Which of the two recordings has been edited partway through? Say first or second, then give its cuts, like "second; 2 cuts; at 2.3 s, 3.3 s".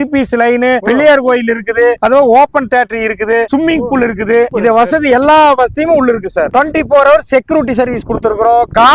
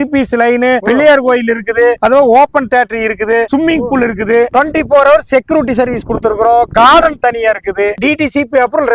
second; 2 cuts; at 4.5 s, 7.9 s